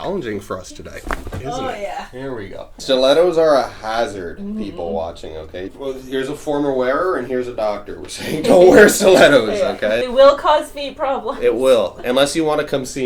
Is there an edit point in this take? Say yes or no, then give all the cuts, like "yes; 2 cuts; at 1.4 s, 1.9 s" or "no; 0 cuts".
yes; 3 cuts; at 2.7 s, 5.7 s, 10.0 s